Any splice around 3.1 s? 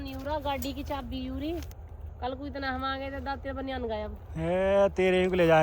no; 1 cut; at 1.8 s

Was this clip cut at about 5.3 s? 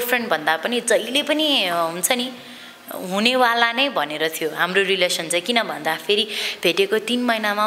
no; 0 cuts

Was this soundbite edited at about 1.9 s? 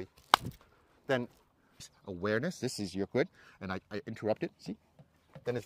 yes; 1 cut; at 1.9 s

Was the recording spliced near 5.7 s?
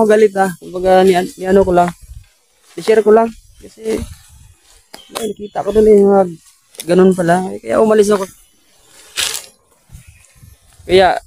no; 1 cut; at 8.2 s

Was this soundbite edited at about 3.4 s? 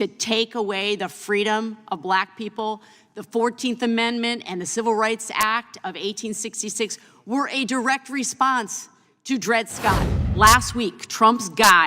no; 1 cut; at 10.2 s

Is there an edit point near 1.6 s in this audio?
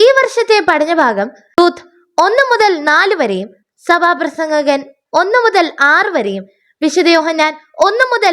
yes; 1 cut; at 1.6 s

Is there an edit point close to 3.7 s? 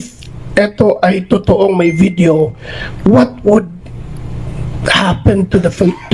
no; 0 cuts

